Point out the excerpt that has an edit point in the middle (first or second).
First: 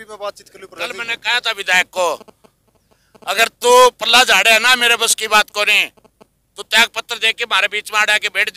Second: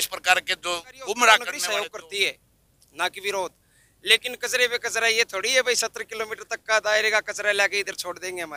second